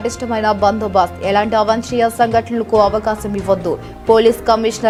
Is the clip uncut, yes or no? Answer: yes